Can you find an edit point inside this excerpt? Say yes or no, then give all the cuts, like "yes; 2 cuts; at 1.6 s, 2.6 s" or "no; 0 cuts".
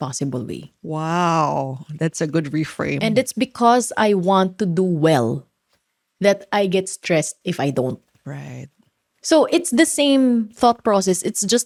no; 0 cuts